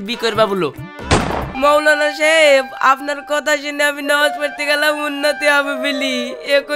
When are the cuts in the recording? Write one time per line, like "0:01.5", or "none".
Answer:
0:01.5